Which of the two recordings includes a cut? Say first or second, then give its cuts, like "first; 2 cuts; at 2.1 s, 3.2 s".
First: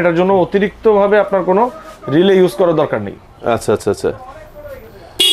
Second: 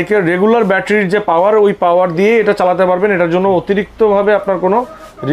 first; 1 cut; at 3.1 s